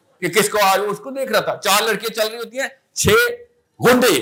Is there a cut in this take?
no; 0 cuts

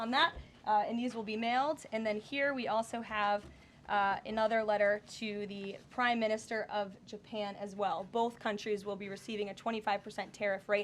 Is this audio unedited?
yes; 0 cuts

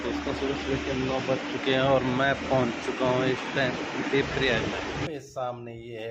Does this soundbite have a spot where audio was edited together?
yes; 1 cut; at 5.0 s

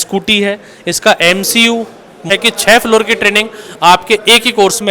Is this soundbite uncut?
no; 1 cut; at 2.2 s

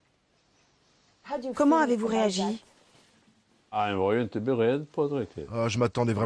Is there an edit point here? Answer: no; 0 cuts

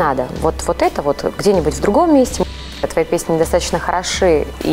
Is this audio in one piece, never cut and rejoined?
no; 1 cut; at 2.7 s

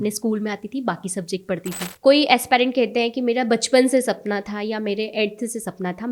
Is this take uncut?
no; 1 cut; at 1.9 s

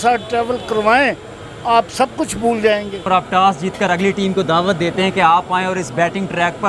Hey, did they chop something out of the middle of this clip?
yes; 1 cut; at 3.0 s

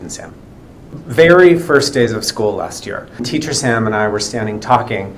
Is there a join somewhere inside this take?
yes; 2 cuts; at 1.0 s, 3.3 s

